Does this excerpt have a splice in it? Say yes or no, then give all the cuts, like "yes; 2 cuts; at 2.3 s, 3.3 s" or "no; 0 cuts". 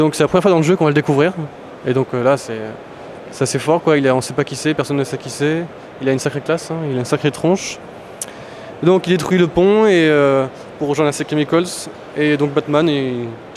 no; 0 cuts